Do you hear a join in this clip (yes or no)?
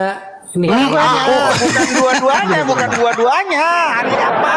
no